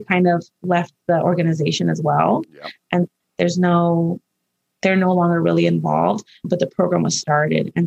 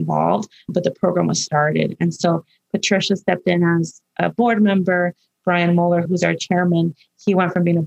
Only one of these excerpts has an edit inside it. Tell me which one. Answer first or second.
second